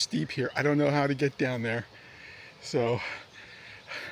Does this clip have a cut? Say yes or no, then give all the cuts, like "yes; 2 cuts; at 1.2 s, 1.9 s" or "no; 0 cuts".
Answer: no; 0 cuts